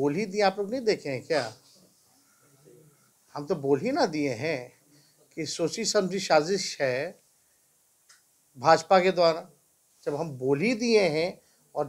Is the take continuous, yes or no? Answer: yes